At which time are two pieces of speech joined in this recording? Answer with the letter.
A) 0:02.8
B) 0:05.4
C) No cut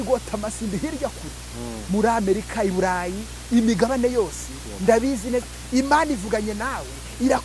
B